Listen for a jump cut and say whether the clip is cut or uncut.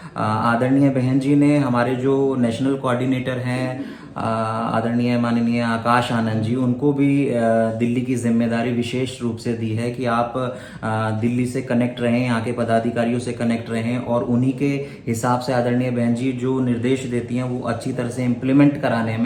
uncut